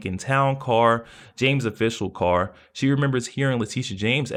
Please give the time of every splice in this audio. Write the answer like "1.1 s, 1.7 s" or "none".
none

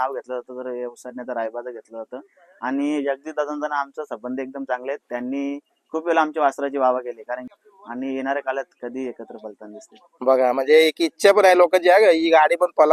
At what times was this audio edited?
7.5 s

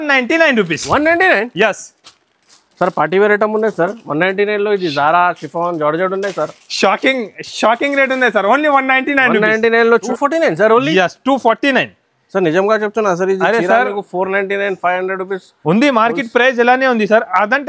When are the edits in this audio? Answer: 10.0 s

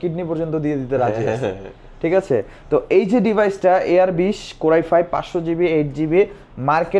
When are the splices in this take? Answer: none

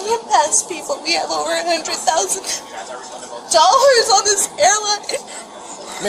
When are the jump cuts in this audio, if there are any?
none

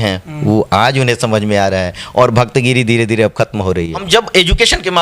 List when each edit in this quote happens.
4.0 s

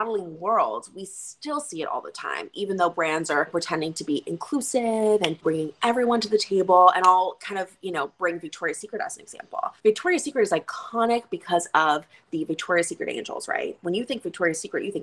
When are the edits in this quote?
3.5 s, 5.4 s, 9.7 s

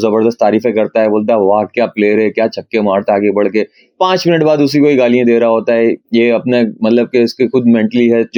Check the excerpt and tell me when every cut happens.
none

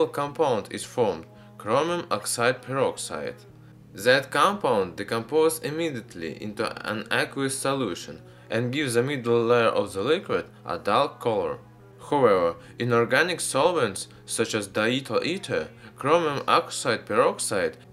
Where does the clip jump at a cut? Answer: none

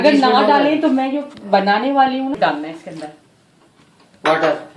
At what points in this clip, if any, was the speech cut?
2.3 s

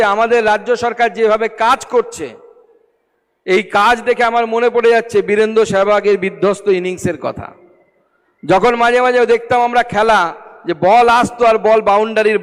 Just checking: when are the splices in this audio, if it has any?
none

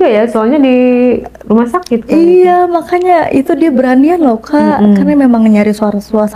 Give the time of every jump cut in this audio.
none

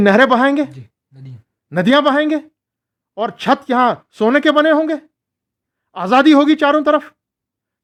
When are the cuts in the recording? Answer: none

